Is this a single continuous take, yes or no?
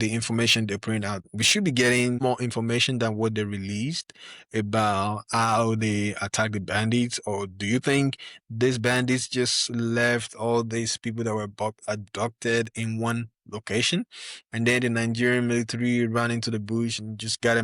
no